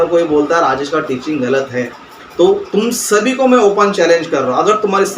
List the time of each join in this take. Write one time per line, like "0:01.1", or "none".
0:02.2